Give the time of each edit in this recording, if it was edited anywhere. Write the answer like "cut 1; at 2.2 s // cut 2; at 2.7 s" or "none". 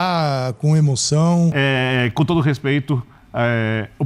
cut 1; at 1.5 s